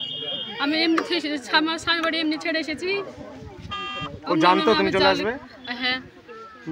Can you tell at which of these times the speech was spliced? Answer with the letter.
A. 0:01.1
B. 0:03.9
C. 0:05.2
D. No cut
D